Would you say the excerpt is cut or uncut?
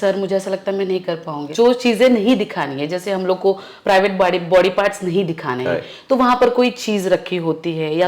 cut